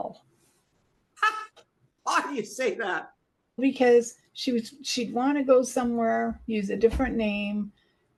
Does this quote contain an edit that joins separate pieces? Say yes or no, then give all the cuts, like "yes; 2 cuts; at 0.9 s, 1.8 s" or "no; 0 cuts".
no; 0 cuts